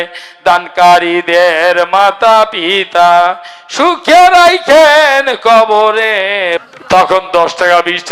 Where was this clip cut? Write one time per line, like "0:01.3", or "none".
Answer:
0:06.7